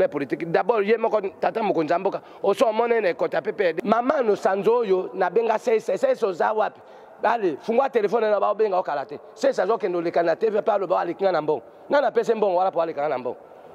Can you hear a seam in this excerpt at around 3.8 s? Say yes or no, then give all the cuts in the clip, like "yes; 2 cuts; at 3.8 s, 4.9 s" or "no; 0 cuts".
yes; 1 cut; at 3.8 s